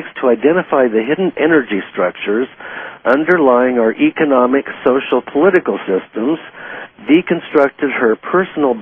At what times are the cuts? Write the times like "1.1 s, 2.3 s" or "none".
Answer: none